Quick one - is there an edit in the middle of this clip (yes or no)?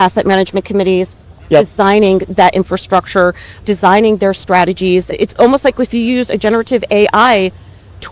yes